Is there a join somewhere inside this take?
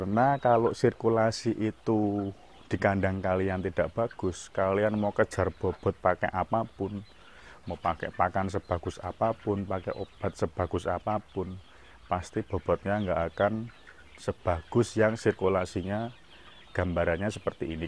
no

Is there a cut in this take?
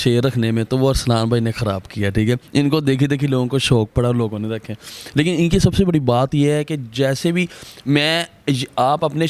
no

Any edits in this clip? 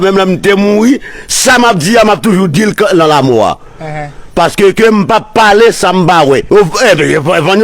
yes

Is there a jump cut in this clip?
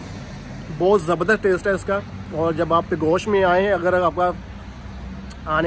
no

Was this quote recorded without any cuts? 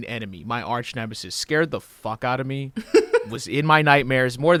yes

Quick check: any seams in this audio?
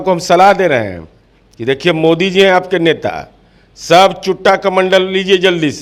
no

